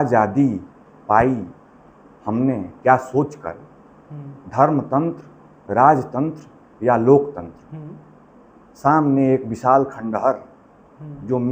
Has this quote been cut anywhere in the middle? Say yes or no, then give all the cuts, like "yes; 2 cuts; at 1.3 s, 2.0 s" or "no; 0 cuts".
no; 0 cuts